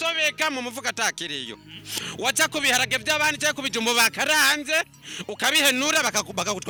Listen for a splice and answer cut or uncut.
uncut